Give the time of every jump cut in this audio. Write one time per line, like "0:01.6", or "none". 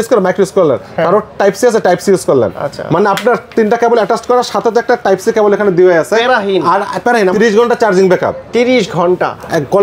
0:07.3